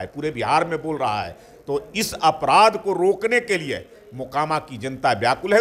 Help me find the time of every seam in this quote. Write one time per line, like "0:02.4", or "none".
none